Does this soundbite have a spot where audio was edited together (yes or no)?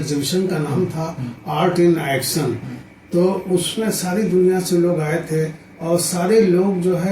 no